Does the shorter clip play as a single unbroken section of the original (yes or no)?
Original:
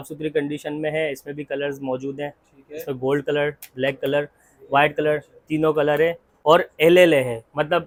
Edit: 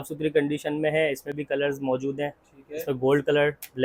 yes